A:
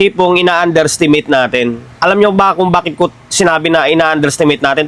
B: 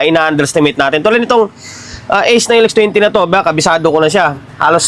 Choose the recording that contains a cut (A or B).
A